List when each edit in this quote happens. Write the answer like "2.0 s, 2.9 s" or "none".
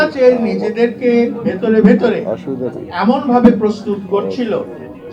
none